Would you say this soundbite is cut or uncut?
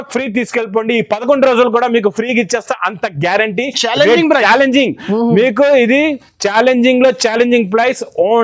uncut